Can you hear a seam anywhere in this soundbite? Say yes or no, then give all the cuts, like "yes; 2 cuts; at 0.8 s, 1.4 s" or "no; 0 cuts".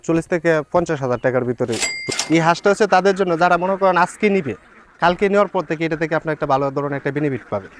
yes; 1 cut; at 1.9 s